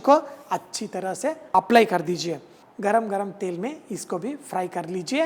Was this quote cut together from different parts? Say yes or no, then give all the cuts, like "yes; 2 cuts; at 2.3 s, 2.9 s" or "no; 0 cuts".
yes; 2 cuts; at 1.5 s, 2.6 s